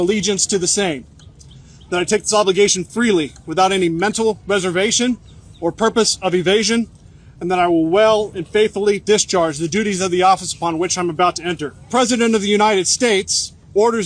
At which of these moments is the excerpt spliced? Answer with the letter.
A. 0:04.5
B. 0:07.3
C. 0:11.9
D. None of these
C